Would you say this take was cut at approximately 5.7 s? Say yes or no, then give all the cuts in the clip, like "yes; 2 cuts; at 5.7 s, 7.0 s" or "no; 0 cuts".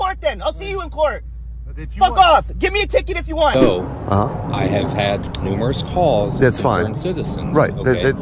no; 1 cut; at 3.5 s